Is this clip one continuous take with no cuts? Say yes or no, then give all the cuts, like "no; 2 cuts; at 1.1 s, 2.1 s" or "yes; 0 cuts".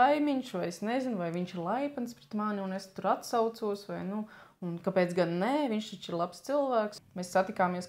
no; 1 cut; at 6.9 s